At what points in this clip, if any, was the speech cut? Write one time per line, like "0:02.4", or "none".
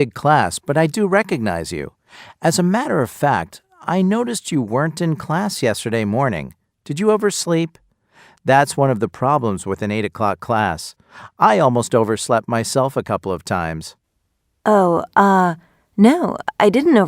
none